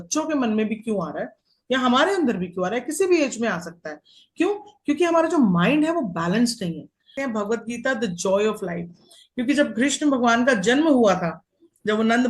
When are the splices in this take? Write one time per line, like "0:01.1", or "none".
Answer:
0:07.1